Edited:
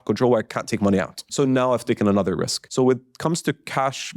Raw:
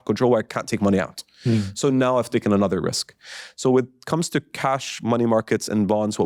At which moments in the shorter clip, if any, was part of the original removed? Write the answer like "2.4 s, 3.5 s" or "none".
1.3 s, 2.6 s